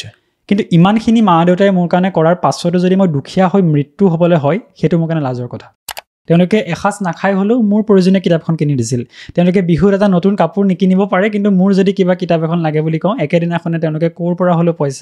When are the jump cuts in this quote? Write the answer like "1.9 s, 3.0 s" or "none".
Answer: 6.1 s